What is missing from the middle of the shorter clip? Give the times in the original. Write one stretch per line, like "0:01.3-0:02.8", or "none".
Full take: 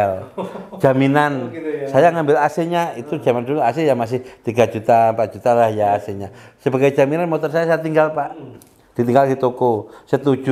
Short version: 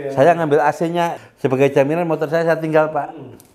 0:03.0-0:06.5